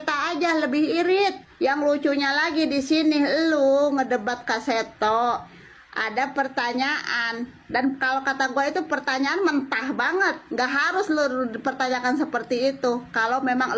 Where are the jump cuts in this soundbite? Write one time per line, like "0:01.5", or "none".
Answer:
0:01.5